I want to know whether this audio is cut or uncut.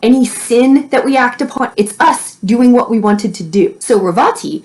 cut